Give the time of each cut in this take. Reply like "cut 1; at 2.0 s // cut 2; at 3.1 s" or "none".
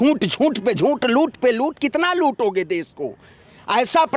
none